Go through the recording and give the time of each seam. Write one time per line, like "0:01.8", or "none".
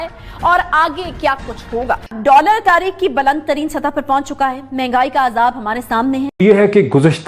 0:02.1
0:06.3